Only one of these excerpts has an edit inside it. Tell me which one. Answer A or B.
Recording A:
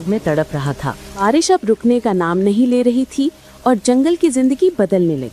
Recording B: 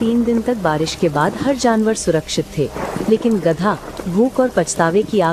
A